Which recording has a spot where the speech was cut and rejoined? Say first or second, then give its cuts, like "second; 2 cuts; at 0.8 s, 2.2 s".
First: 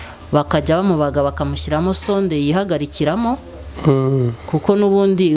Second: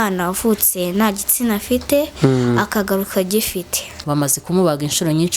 second; 1 cut; at 4.0 s